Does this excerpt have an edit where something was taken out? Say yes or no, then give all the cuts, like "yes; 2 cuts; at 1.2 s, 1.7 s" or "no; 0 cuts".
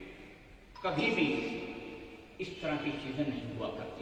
no; 0 cuts